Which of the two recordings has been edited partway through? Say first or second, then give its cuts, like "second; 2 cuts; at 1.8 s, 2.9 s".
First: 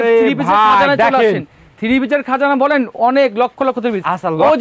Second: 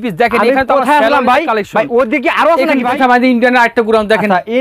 second; 1 cut; at 3.0 s